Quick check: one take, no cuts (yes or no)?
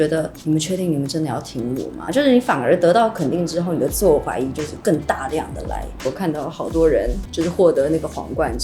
no